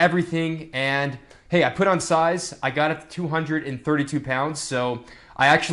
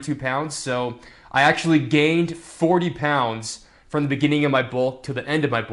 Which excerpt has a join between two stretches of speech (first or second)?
second